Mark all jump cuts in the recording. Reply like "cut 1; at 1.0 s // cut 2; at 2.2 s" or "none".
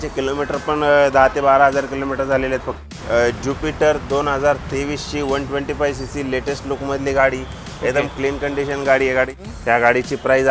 cut 1; at 2.9 s // cut 2; at 9.4 s